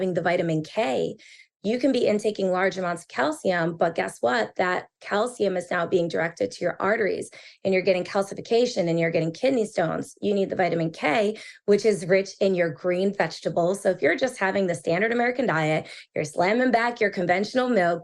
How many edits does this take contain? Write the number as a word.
one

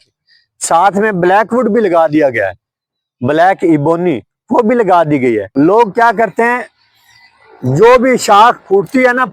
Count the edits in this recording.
one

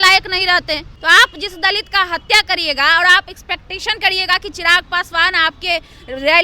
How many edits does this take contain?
one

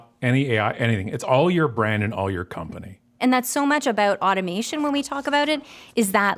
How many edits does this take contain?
one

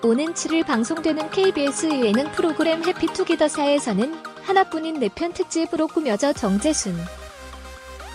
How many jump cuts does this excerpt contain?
one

